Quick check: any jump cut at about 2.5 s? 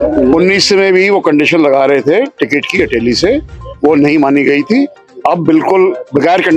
no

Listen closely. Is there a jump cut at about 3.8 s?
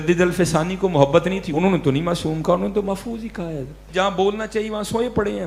yes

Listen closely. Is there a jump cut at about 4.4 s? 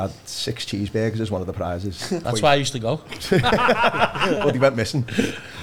yes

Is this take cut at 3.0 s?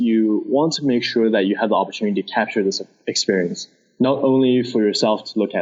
no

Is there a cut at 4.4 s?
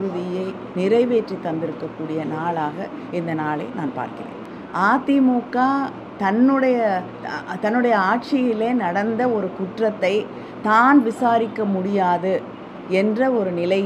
yes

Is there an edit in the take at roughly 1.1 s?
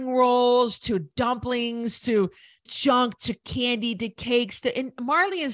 no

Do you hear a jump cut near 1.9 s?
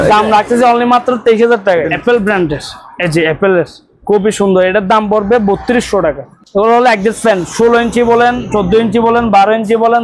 yes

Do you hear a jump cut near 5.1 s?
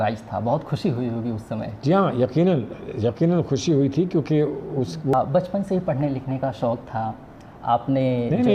yes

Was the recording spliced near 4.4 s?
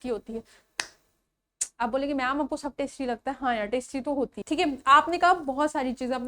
yes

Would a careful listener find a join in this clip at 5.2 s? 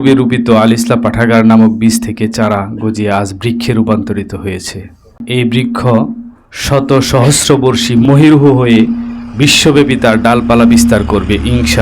yes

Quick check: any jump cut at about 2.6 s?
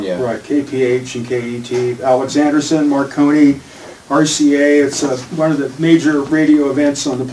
yes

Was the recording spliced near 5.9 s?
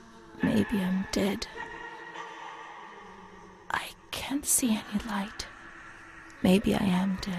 no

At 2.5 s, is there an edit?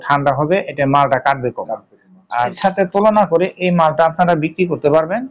yes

